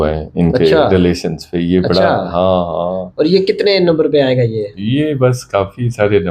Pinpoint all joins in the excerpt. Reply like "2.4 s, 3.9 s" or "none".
none